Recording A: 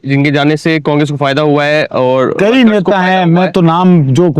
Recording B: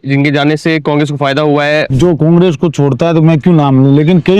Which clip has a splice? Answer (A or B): B